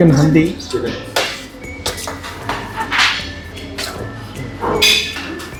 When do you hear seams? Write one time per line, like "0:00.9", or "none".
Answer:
none